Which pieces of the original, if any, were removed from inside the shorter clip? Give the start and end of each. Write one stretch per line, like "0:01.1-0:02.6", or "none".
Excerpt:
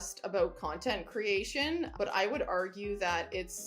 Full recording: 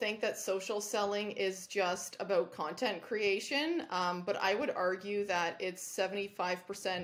0:03.9-0:04.2